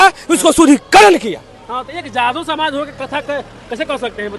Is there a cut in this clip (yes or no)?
no